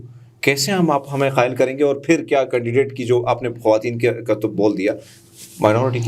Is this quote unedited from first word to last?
yes; 0 cuts

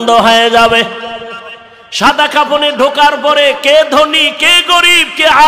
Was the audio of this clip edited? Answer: no; 0 cuts

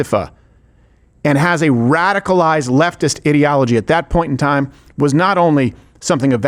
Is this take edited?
no; 0 cuts

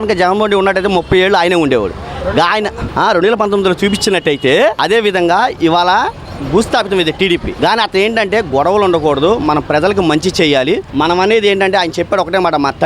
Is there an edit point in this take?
yes; 4 cuts; at 2.8 s, 4.8 s, 7.5 s, 10.9 s

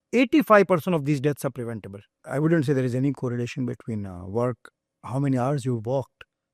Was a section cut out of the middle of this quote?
yes; 1 cut; at 2.1 s

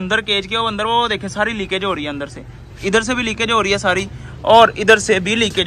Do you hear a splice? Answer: no; 0 cuts

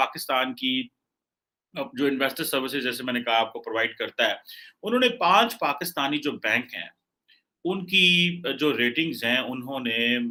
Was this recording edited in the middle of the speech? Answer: no; 0 cuts

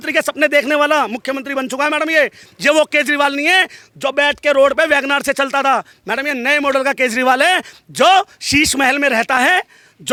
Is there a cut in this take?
no; 0 cuts

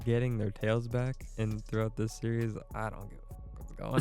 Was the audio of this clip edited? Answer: yes; 1 cut; at 1.2 s

